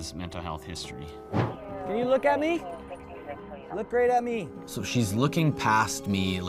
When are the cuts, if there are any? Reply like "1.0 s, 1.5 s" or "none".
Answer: 1.5 s